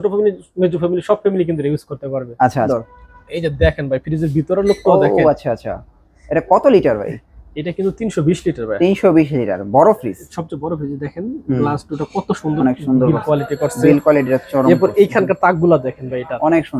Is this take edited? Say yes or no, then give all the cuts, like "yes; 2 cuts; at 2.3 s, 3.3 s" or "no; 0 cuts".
yes; 1 cut; at 2.7 s